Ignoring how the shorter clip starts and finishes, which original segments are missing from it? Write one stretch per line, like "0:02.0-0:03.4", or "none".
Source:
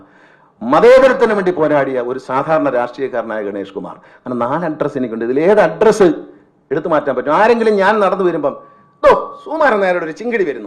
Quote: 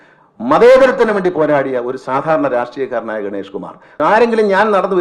0:04.1-0:07.2

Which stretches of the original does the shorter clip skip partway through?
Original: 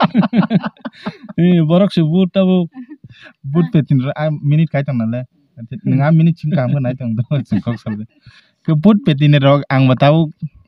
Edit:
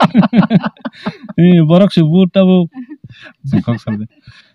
0:03.4-0:07.4

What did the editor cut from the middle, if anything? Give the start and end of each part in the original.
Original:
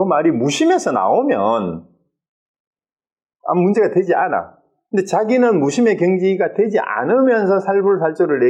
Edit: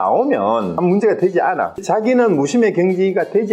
0:01.8-0:03.5
0:04.6-0:05.1

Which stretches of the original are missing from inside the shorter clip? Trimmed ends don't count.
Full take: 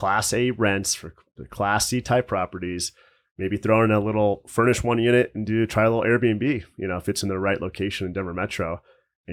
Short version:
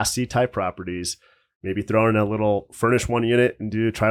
none

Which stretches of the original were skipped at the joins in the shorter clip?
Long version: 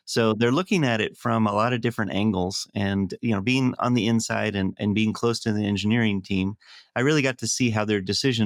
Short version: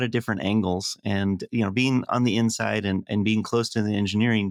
none

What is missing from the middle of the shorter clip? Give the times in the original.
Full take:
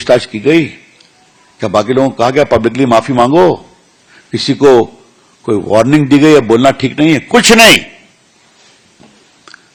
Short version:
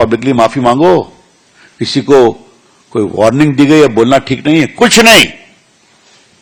none

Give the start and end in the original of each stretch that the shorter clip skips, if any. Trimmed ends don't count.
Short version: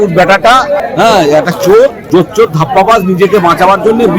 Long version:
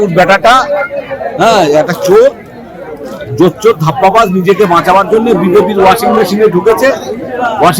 0:00.8-0:01.3
0:02.4-0:03.3

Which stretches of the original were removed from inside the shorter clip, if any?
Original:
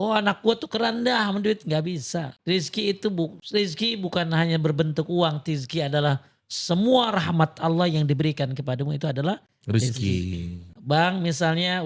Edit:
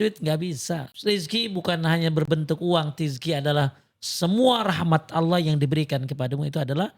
0:02.4-0:03.4

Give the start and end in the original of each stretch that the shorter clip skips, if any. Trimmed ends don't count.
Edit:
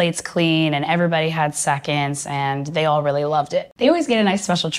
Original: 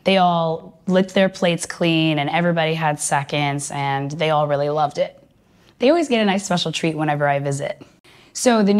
0:05.3-0:05.9

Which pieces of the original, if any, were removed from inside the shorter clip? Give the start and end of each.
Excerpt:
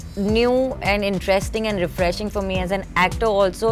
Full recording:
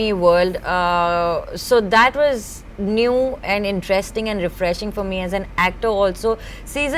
none

